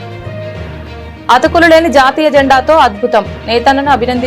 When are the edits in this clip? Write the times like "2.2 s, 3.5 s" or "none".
1.2 s